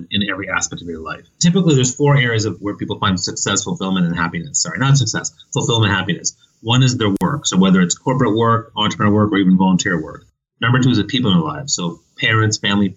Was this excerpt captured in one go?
no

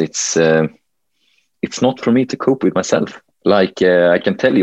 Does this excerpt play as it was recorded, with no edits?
no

